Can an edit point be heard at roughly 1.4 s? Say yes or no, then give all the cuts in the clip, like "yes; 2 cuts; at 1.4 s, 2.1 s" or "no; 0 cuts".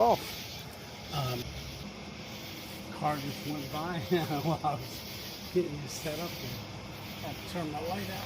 yes; 1 cut; at 1.4 s